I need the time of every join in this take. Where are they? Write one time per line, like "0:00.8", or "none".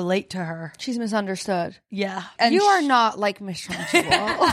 0:02.3